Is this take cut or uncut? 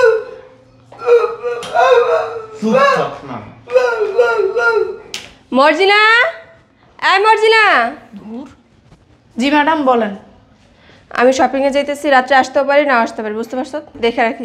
uncut